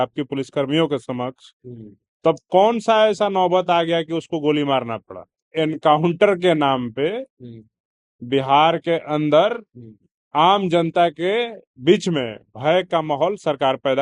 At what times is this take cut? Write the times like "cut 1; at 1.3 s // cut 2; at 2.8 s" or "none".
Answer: cut 1; at 5.4 s